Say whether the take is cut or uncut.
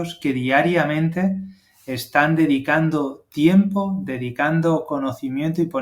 uncut